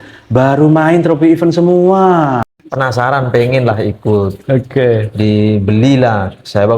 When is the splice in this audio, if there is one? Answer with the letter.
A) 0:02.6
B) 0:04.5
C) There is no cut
A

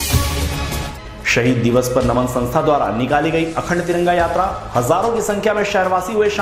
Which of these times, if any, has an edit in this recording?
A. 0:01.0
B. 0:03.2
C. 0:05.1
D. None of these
A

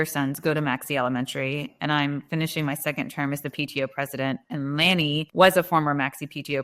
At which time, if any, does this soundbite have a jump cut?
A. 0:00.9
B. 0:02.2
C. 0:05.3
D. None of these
C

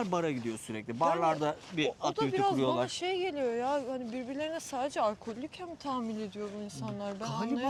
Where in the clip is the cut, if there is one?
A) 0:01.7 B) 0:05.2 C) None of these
C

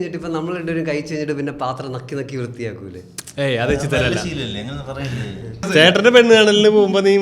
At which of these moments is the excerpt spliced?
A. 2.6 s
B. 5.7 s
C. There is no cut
B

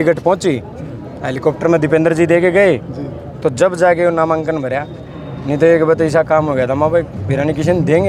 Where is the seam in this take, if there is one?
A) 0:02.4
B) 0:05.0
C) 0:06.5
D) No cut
D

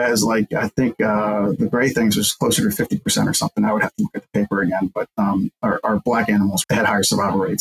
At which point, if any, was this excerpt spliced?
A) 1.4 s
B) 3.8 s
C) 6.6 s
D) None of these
C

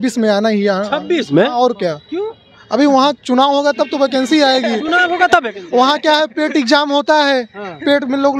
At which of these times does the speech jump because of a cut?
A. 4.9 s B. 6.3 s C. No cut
C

